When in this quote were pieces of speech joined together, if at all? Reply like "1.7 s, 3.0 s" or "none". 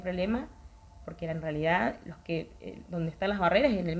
none